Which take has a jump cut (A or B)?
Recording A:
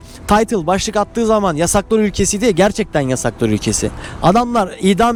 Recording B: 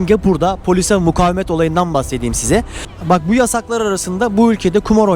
B